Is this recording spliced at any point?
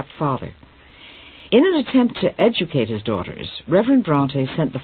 no; 0 cuts

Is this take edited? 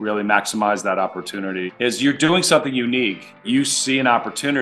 yes; 2 cuts; at 1.7 s, 3.4 s

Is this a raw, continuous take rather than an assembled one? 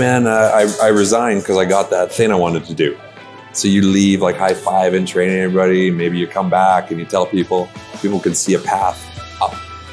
no; 1 cut; at 2.1 s

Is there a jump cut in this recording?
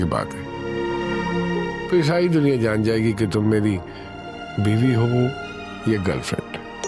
no; 0 cuts

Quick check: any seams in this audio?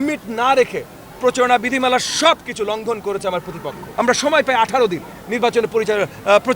yes; 1 cut; at 3.9 s

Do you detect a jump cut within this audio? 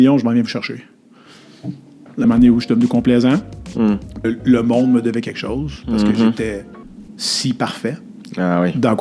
yes; 2 cuts; at 2.2 s, 4.3 s

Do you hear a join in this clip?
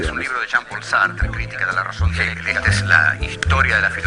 yes; 1 cut; at 2.8 s

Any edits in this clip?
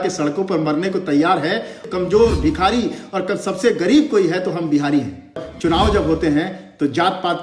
yes; 2 cuts; at 1.8 s, 5.5 s

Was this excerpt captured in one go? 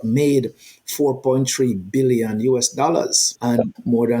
yes; 0 cuts

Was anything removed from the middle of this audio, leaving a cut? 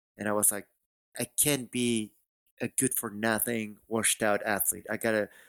yes; 1 cut; at 1.2 s

